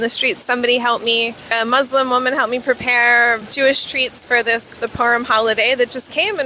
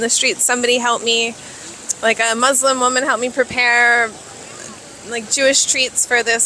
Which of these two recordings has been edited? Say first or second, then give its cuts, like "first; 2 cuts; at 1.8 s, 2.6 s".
first; 2 cuts; at 1.5 s, 3.5 s